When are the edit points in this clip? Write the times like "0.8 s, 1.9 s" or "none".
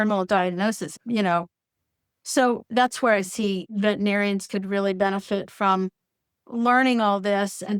1.0 s

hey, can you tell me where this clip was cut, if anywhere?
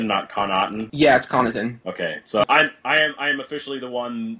2.4 s

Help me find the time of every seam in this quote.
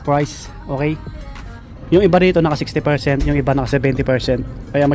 1.2 s

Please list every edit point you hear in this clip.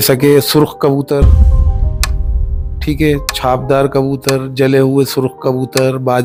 none

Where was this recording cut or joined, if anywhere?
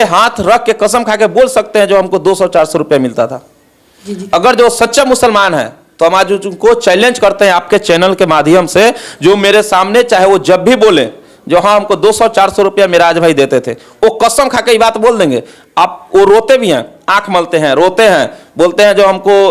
none

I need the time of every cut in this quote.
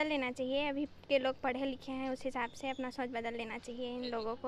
none

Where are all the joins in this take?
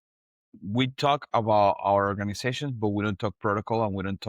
none

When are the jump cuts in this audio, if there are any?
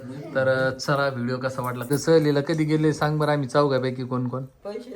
1.9 s

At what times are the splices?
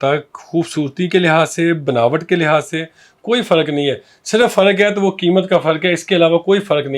none

